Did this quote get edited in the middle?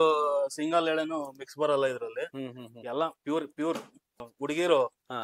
yes; 1 cut; at 4.2 s

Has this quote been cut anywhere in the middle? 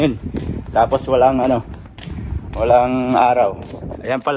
no; 0 cuts

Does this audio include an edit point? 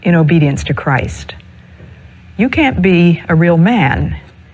no; 0 cuts

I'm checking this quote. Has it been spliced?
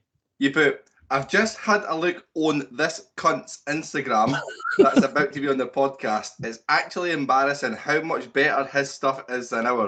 no; 0 cuts

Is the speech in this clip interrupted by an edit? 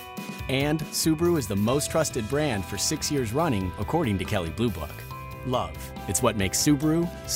no; 0 cuts

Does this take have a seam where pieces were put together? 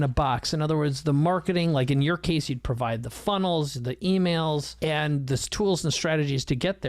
yes; 1 cut; at 4.7 s

